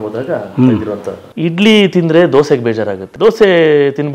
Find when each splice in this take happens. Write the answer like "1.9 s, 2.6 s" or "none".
1.2 s, 3.0 s